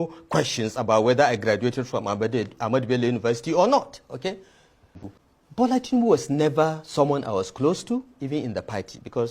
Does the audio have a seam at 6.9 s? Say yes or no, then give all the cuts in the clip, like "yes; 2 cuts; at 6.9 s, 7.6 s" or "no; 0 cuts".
no; 1 cut; at 5.0 s